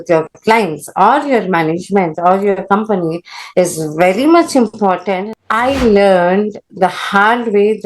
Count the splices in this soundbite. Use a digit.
1